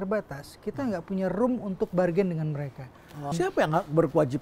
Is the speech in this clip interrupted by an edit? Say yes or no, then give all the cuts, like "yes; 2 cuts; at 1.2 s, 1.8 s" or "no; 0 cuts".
yes; 1 cut; at 3.3 s